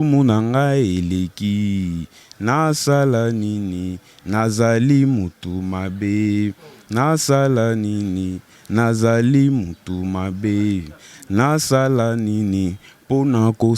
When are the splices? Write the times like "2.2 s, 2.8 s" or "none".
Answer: none